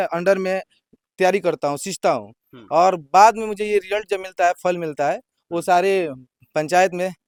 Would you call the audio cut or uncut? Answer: uncut